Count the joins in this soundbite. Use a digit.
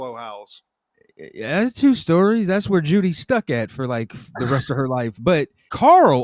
0